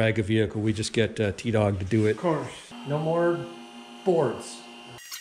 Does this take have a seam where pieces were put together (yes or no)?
no